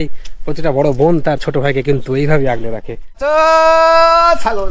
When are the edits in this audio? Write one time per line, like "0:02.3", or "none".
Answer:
0:03.2